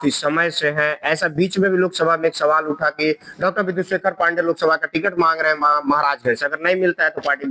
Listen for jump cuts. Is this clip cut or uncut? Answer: uncut